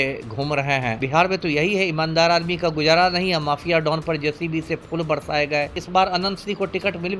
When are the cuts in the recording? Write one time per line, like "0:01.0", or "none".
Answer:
0:01.0
0:05.8